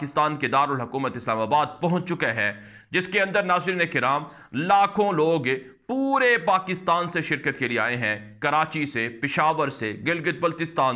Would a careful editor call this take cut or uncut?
uncut